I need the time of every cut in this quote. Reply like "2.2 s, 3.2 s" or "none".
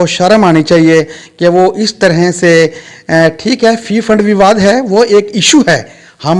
none